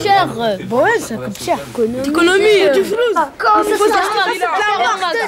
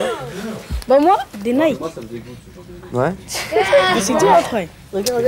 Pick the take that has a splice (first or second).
first